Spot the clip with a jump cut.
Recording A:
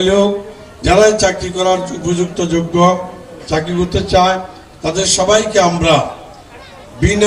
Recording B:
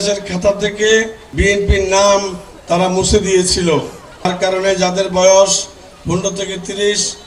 B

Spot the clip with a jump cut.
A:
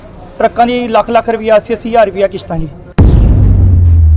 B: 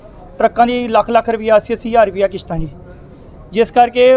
A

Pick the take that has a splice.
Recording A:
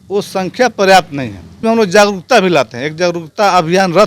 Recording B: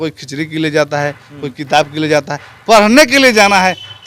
A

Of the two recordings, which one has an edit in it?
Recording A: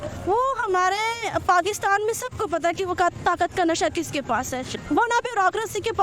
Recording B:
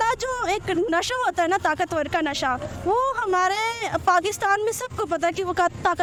A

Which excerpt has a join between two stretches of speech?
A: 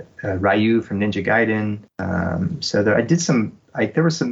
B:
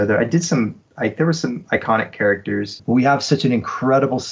B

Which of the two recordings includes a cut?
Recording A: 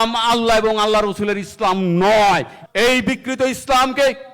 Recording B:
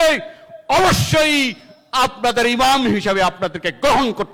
A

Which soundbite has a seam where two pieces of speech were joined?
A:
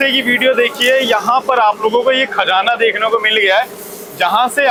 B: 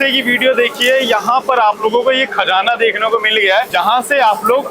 B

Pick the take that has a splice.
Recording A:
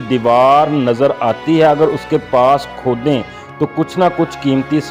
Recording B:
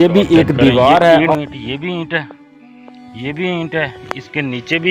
B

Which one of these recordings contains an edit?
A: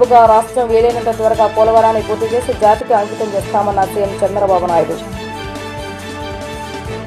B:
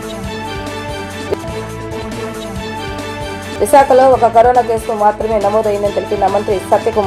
B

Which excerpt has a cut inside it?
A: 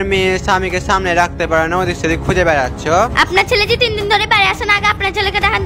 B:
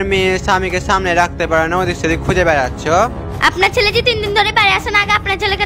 A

